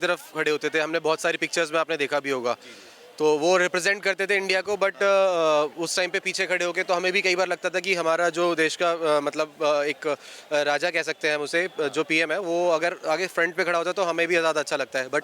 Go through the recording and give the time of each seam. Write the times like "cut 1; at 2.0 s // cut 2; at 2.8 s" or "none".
none